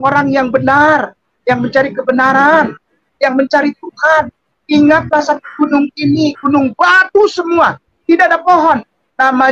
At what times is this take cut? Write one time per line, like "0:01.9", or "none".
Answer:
none